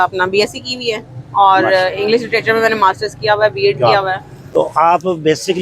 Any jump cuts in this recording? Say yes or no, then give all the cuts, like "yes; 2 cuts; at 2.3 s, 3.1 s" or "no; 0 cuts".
yes; 1 cut; at 4.3 s